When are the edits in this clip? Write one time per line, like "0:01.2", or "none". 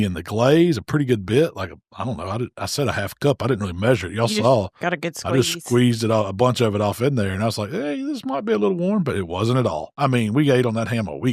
0:09.9